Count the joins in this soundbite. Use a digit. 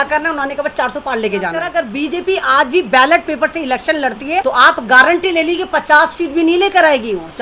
2